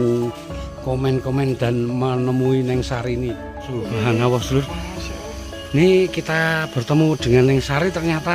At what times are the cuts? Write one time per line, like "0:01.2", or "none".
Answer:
0:03.8